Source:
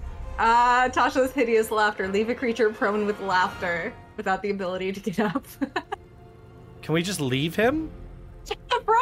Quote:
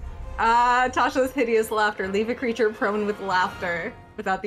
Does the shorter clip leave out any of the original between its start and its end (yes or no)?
no